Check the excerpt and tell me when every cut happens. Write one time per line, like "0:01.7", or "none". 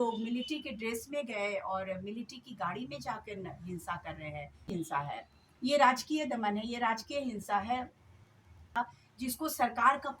0:04.9
0:08.8

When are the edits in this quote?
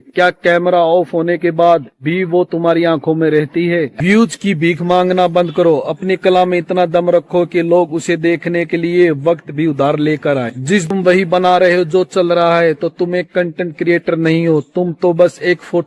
0:03.9
0:10.9

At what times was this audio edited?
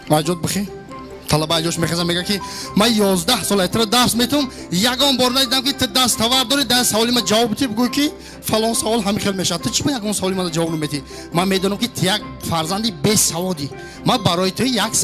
0:02.6

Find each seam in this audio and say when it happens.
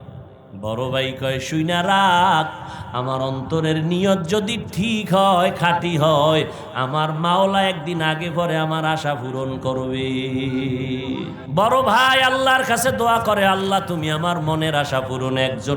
0:11.3

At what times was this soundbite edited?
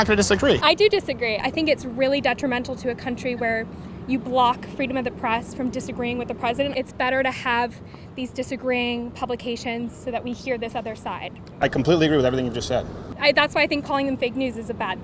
0:01.4
0:06.7
0:13.0

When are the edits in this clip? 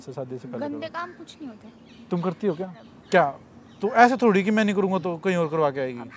0:02.9

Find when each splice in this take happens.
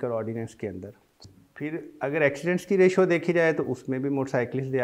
0:01.2

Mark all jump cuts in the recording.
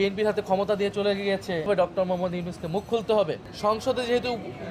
0:01.7
0:03.4

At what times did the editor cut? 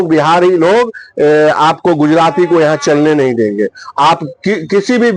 none

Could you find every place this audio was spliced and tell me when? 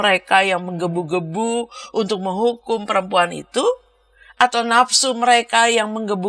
none

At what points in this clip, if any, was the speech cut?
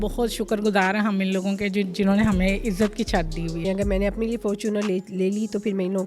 0:03.6

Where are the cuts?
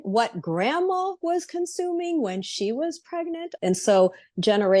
0:03.5

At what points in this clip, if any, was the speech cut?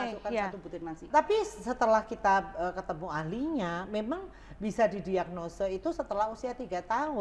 0:01.1

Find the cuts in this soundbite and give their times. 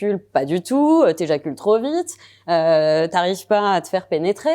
none

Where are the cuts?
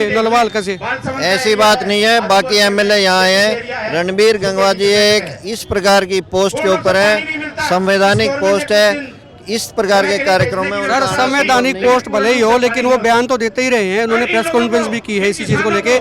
none

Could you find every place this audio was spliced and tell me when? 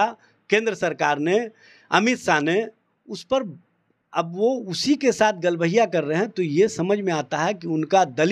none

